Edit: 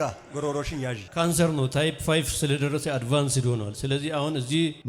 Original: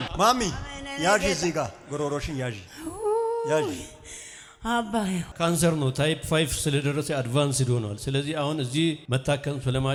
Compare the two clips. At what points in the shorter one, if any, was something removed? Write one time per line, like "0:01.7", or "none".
0:01.1